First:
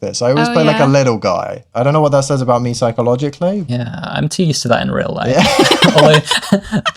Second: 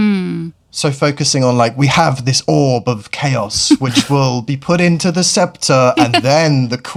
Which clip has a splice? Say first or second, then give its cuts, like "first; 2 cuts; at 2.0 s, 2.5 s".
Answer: first; 2 cuts; at 1.7 s, 3.7 s